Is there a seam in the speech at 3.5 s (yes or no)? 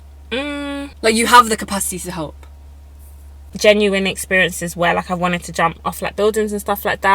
yes